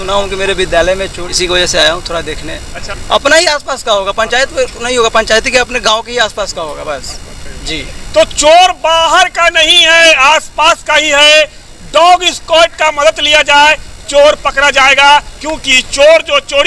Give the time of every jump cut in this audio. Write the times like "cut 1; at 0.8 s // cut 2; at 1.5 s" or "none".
cut 1; at 1.2 s // cut 2; at 2.9 s